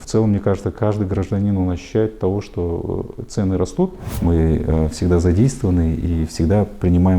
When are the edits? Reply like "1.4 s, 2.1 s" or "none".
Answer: 4.1 s